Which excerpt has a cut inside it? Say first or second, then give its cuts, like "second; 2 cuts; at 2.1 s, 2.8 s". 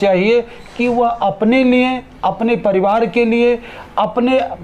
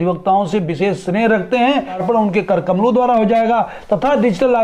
second; 1 cut; at 2.0 s